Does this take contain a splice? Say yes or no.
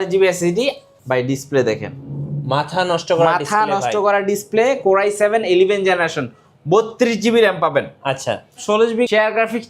yes